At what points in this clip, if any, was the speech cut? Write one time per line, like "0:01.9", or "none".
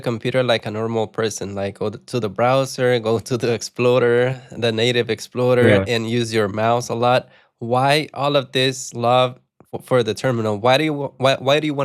none